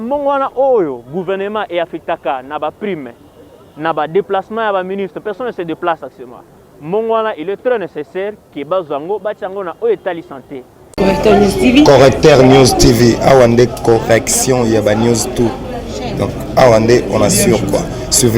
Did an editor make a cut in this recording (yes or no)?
yes